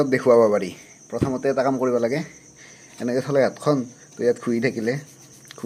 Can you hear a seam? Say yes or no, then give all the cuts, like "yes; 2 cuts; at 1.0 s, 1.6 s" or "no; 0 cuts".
no; 0 cuts